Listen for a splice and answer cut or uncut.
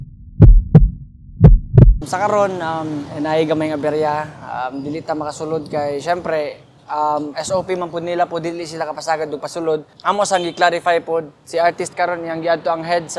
cut